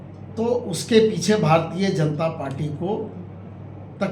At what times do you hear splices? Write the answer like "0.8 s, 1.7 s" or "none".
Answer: none